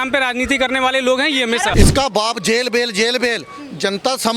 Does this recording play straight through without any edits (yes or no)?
no